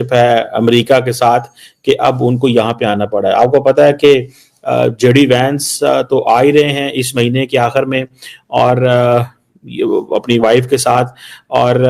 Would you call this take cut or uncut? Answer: uncut